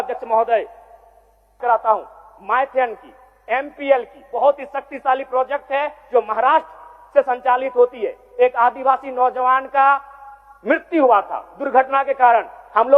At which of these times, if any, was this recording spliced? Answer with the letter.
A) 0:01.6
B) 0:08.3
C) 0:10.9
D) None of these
A